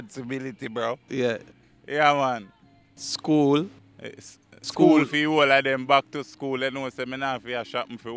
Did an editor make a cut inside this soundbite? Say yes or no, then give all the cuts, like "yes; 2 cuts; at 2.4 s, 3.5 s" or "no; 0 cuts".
no; 0 cuts